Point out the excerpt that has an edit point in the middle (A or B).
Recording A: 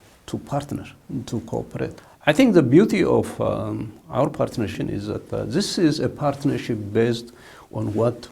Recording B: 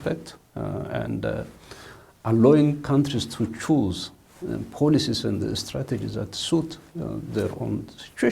A